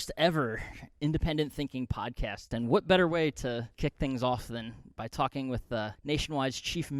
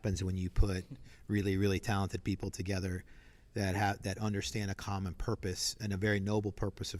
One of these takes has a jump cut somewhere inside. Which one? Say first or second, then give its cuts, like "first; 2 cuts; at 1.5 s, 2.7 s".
first; 3 cuts; at 2.5 s, 3.7 s, 6.0 s